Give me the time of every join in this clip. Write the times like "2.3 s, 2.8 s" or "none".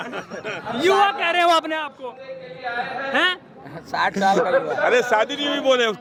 none

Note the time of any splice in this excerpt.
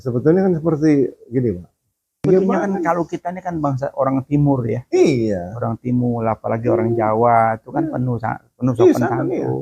2.2 s

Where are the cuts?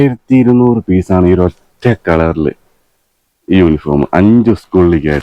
none

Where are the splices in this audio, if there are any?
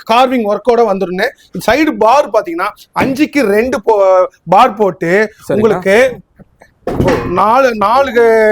none

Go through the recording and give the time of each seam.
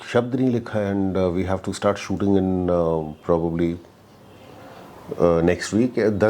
none

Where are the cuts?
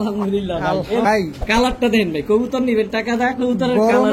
1.1 s

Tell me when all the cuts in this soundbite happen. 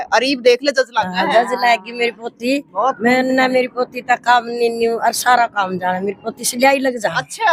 none

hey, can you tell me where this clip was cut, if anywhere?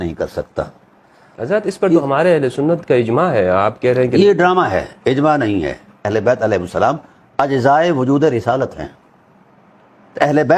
1.4 s, 6.1 s

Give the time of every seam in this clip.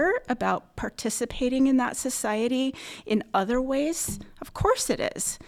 none

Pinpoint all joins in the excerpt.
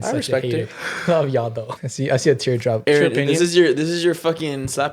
1.7 s, 2.8 s

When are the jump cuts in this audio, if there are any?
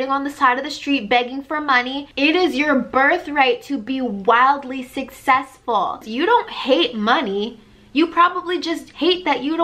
2.0 s, 6.1 s

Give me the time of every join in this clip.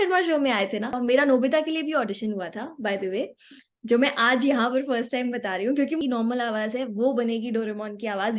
0.9 s, 6.0 s

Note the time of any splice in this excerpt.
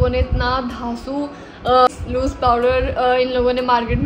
1.9 s

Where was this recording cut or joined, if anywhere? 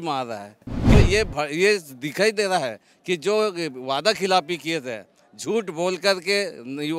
0.9 s

